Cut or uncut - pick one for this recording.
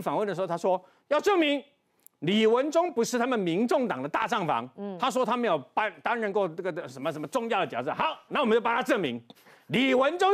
uncut